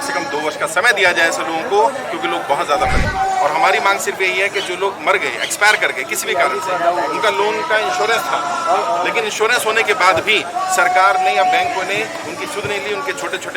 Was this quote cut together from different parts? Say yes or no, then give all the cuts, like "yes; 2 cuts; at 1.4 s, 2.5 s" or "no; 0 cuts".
yes; 1 cut; at 3.0 s